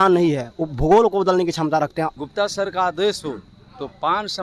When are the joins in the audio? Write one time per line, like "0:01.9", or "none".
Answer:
0:02.1